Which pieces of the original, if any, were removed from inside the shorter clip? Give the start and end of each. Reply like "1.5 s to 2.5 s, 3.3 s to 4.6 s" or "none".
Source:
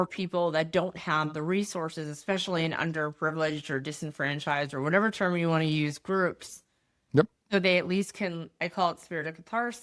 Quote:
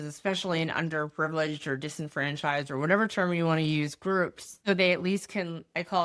6.6 s to 7.4 s